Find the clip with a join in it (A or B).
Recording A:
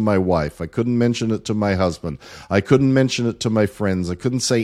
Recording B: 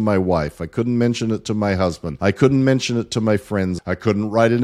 B